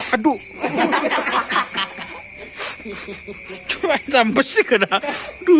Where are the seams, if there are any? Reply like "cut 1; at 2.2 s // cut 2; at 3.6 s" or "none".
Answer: none